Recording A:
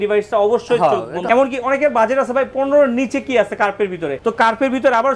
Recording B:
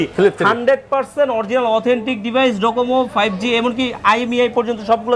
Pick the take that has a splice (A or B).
A